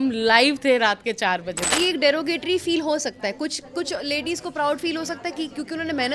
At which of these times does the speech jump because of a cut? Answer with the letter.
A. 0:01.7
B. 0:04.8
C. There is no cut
A